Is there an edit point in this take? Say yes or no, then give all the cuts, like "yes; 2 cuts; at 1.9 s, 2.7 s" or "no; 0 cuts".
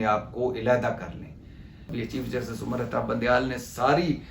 yes; 1 cut; at 1.9 s